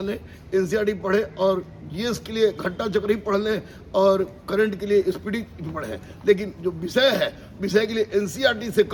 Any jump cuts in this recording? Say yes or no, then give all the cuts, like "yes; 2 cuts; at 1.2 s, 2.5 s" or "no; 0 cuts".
no; 0 cuts